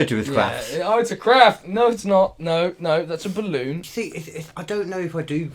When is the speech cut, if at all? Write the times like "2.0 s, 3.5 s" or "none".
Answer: 3.8 s